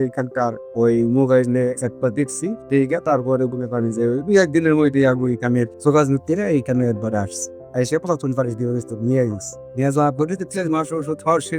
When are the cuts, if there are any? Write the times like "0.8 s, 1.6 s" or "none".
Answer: none